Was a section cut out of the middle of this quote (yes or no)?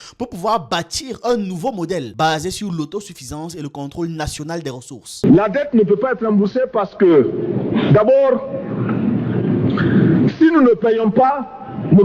yes